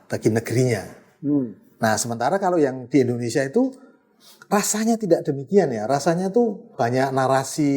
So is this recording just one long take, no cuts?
yes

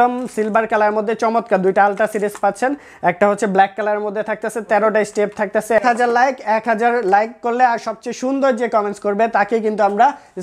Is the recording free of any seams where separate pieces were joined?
no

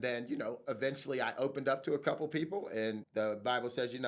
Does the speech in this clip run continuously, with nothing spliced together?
no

